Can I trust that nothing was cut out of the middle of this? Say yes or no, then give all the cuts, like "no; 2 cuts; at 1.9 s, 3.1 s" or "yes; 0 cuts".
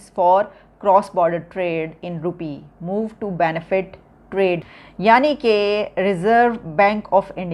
no; 1 cut; at 4.7 s